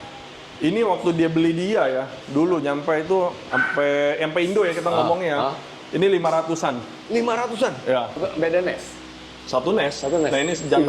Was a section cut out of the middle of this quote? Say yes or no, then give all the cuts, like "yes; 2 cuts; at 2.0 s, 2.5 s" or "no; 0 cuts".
yes; 1 cut; at 8.2 s